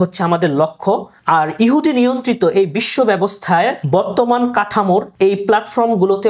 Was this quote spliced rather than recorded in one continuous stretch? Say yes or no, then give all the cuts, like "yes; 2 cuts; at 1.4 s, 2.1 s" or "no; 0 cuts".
yes; 3 cuts; at 1.1 s, 3.8 s, 5.1 s